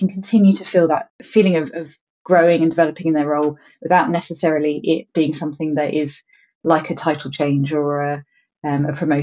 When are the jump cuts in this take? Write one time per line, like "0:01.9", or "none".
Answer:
0:01.2